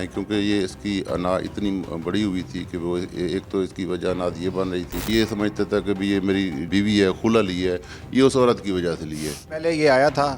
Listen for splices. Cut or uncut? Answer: cut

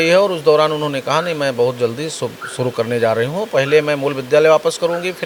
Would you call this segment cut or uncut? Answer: uncut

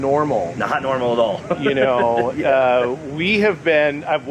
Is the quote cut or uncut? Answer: uncut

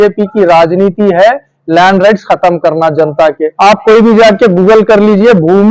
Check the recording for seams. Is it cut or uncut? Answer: cut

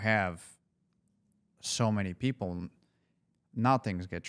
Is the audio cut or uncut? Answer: uncut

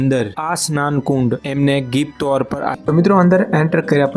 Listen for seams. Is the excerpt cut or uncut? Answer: cut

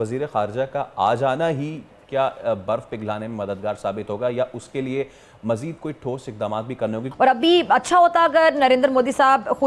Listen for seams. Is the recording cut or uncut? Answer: cut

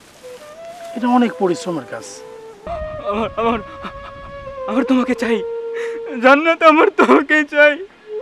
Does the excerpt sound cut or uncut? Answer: cut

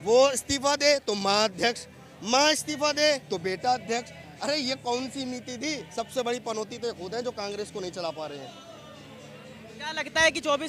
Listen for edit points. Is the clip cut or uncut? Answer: uncut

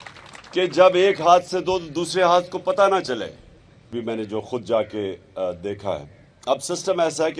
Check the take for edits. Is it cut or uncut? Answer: cut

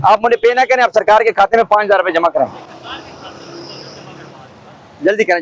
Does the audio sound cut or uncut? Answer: uncut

